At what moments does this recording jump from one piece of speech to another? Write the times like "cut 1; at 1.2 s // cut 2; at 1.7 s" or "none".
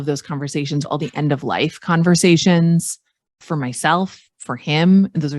cut 1; at 0.8 s // cut 2; at 3.4 s